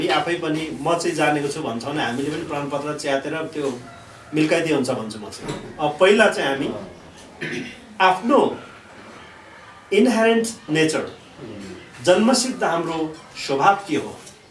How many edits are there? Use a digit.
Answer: 0